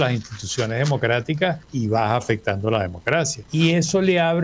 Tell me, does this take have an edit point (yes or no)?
yes